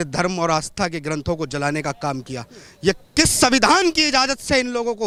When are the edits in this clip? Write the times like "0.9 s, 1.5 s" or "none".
none

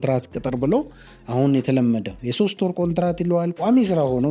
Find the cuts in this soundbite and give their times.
none

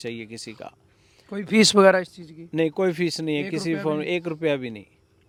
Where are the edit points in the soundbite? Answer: none

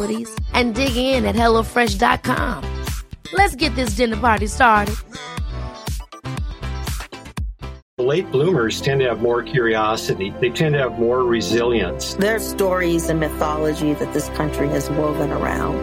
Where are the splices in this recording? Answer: 7.8 s

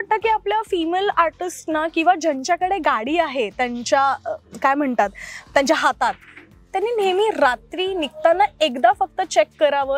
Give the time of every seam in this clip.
none

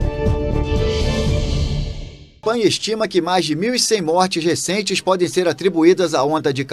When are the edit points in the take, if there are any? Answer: 2.4 s

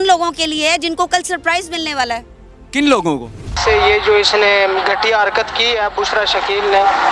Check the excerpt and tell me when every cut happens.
3.6 s

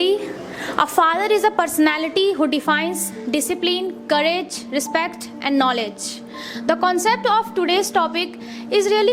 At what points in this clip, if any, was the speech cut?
none

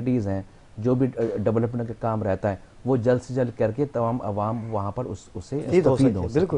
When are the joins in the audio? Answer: 5.7 s

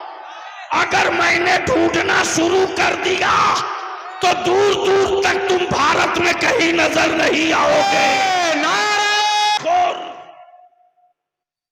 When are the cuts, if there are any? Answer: 9.6 s

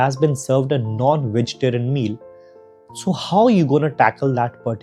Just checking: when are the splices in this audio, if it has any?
none

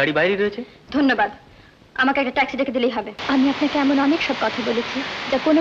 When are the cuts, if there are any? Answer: 3.2 s

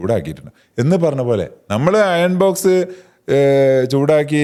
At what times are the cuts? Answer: none

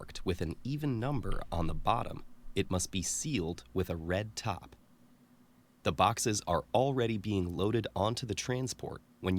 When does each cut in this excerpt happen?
3.9 s

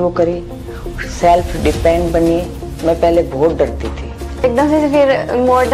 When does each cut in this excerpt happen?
4.3 s

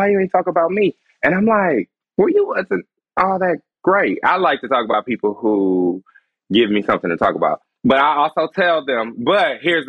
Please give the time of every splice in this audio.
2.0 s, 7.7 s

